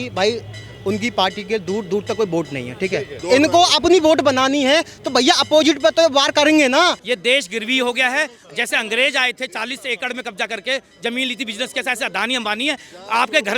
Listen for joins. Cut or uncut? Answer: cut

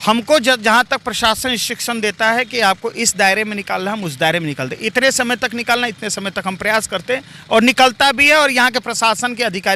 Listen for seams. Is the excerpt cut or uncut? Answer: uncut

